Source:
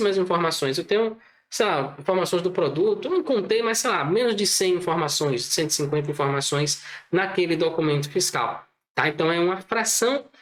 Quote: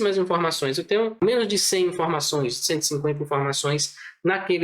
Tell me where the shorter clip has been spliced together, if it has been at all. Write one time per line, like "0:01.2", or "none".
0:01.2